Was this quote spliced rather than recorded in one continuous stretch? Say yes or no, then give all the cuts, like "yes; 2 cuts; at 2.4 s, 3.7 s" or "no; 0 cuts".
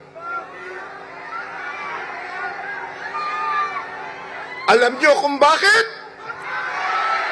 no; 0 cuts